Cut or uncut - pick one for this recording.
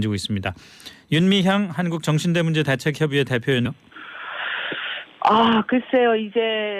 uncut